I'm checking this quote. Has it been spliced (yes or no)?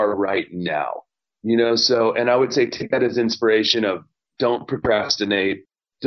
no